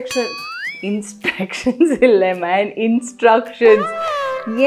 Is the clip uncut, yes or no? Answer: yes